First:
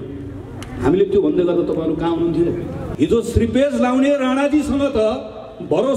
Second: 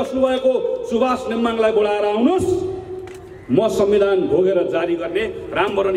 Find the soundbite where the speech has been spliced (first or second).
first